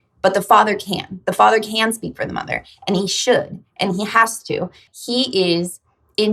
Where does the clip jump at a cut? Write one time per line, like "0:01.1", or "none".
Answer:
0:04.9